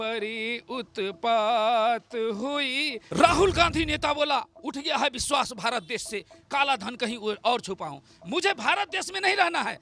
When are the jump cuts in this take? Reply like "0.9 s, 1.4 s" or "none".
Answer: 3.0 s